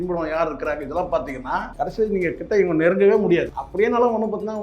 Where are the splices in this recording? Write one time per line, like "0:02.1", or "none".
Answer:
0:01.7
0:03.6